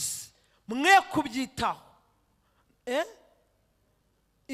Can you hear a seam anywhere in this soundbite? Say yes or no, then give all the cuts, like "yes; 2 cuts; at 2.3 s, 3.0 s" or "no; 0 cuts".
no; 0 cuts